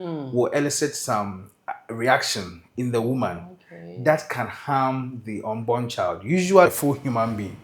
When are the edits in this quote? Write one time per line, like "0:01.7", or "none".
0:06.7